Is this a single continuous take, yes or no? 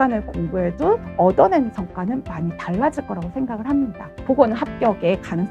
no